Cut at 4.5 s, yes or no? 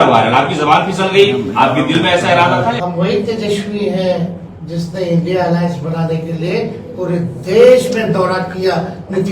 no